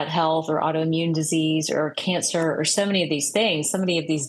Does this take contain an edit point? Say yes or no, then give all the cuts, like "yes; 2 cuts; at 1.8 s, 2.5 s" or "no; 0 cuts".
no; 0 cuts